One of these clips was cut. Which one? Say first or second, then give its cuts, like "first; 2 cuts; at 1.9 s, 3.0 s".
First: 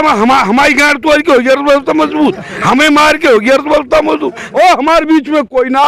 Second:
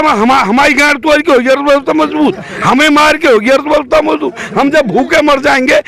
first; 1 cut; at 4.4 s